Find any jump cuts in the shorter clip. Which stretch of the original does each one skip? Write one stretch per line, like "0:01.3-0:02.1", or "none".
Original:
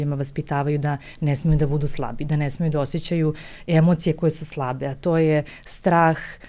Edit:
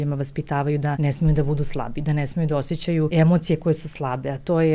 0:01.0-0:01.2
0:03.3-0:03.7